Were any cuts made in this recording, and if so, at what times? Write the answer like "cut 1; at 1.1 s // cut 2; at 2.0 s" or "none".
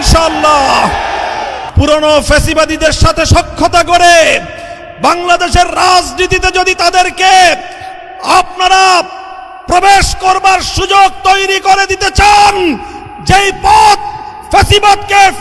cut 1; at 1.6 s